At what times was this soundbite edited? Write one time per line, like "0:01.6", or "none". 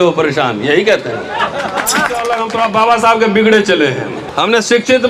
0:02.2
0:04.2